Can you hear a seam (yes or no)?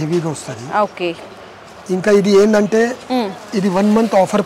no